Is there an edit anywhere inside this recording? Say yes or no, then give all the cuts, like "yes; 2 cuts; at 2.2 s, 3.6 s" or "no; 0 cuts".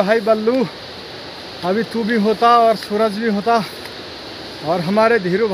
no; 0 cuts